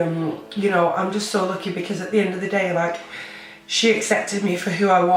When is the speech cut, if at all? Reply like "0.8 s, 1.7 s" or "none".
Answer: none